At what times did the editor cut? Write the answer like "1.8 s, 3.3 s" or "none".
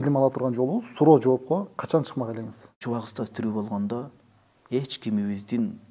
2.8 s